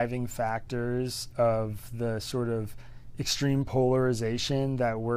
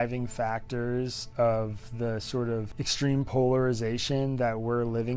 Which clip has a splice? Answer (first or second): second